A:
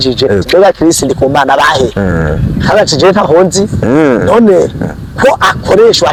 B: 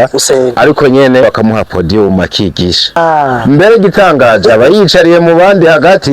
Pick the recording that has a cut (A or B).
B